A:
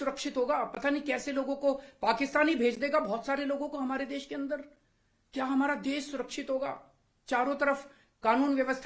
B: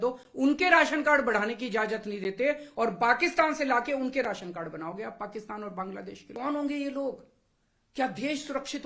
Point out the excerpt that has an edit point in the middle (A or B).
B